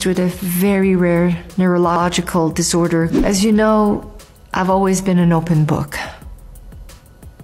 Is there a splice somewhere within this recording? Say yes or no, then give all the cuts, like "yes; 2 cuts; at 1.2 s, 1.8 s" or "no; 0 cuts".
yes; 1 cut; at 1.9 s